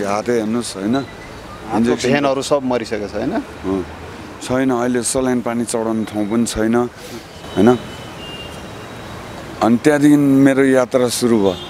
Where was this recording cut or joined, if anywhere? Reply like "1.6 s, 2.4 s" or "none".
none